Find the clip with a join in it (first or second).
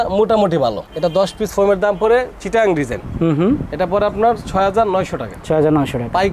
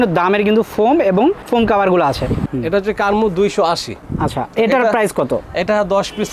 second